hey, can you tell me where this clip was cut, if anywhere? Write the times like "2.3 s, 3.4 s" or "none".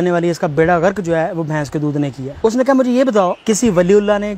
2.3 s, 3.4 s